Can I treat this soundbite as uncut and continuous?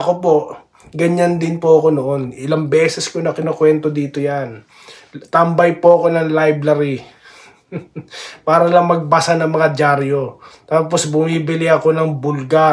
yes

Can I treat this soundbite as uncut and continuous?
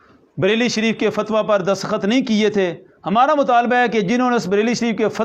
yes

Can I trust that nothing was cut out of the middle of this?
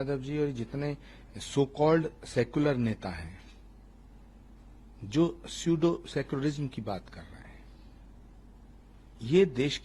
yes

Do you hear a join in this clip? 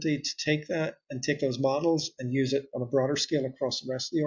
no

